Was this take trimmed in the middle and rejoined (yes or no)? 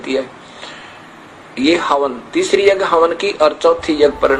no